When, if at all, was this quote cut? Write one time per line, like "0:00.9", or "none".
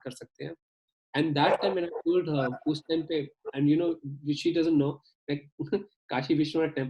none